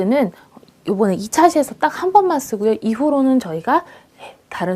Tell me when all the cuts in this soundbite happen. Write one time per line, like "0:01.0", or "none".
0:01.1